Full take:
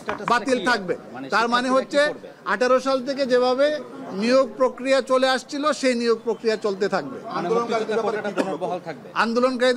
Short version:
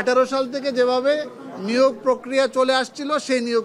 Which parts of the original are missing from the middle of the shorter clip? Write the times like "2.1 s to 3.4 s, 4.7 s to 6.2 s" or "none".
none